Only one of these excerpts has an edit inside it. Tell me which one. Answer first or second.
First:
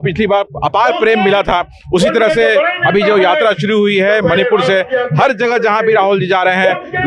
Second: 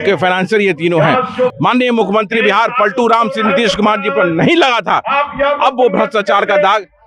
second